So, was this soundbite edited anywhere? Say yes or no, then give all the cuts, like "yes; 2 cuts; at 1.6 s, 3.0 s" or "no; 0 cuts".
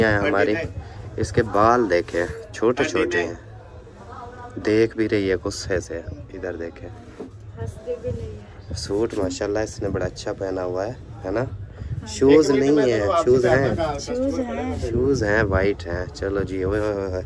no; 0 cuts